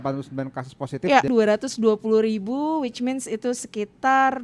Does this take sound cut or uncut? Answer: cut